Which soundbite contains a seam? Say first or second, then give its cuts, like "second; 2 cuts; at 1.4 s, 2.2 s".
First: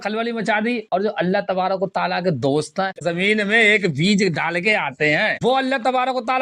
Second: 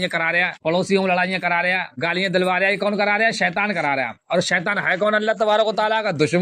first; 2 cuts; at 3.0 s, 5.3 s